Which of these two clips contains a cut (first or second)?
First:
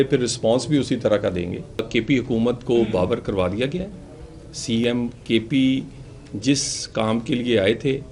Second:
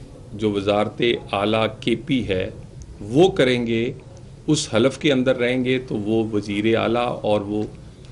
first